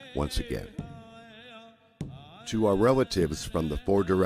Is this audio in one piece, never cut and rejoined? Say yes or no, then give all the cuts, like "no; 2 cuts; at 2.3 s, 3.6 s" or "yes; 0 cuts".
yes; 0 cuts